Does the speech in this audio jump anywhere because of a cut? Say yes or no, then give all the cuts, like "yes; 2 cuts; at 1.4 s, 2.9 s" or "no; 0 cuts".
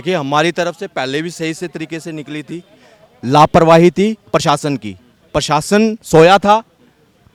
no; 0 cuts